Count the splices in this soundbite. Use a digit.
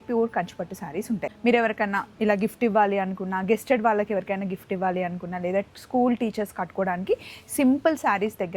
1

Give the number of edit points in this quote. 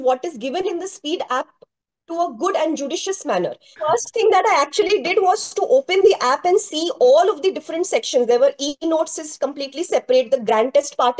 1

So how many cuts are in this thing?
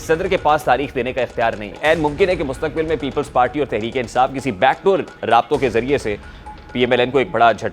1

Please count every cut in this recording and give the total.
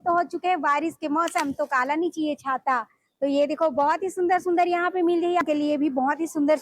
1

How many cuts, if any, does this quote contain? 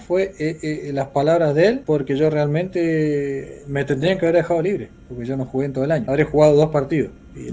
2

